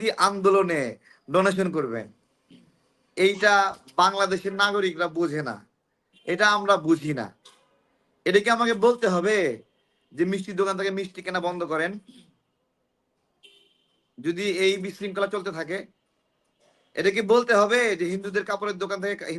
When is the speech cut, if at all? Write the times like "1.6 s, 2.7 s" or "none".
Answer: none